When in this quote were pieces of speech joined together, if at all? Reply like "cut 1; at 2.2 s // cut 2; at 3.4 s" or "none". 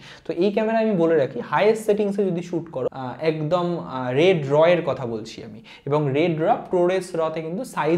cut 1; at 3.0 s